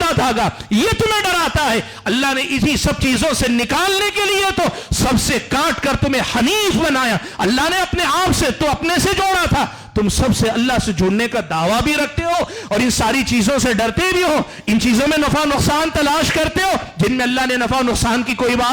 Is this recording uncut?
yes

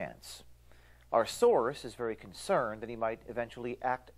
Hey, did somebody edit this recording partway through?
yes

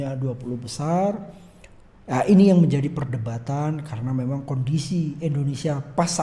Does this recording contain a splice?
no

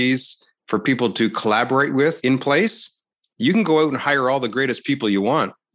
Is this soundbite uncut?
no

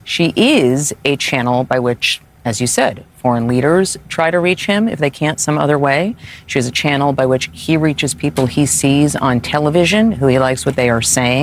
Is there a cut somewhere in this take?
no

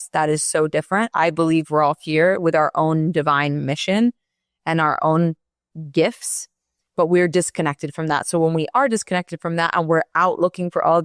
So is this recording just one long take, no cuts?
no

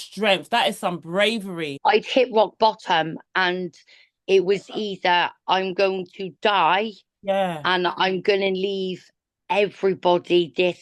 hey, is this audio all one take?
no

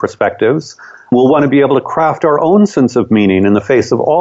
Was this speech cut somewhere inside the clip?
yes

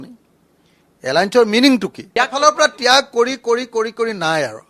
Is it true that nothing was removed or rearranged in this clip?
no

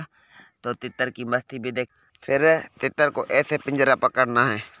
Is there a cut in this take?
yes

